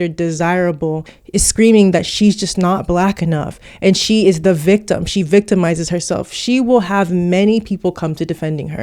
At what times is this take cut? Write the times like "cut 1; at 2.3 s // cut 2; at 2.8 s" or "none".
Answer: cut 1; at 1.1 s